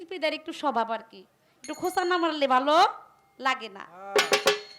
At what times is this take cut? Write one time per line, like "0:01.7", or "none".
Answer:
none